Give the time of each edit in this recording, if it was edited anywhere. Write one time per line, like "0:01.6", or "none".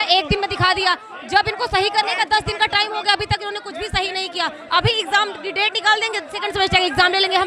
none